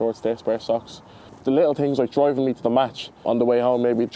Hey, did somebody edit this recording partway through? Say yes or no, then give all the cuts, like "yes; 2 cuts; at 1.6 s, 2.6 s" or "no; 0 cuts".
yes; 1 cut; at 3.2 s